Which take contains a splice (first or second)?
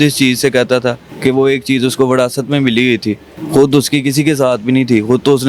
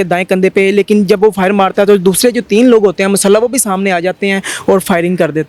first